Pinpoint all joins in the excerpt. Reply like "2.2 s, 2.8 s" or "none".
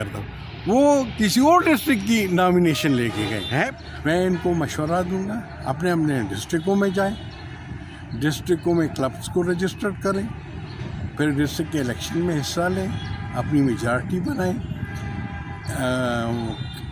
3.7 s